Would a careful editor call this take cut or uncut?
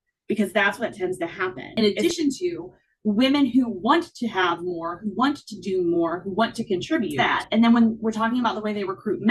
cut